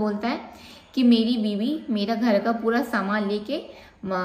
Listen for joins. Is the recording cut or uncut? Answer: uncut